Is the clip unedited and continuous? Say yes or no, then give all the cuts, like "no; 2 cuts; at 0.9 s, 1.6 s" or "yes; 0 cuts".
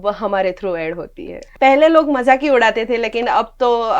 no; 1 cut; at 1.4 s